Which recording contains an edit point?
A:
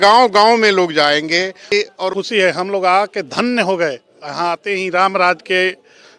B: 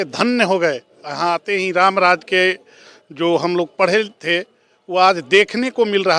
A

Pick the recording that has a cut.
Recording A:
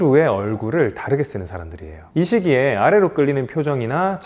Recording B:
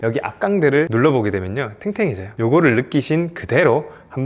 A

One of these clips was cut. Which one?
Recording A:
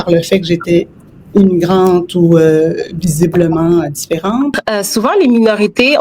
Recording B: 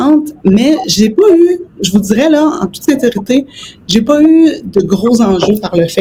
A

